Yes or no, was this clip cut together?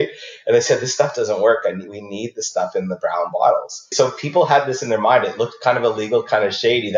yes